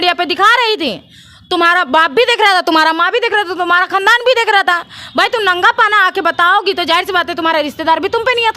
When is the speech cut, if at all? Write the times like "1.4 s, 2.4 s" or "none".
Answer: none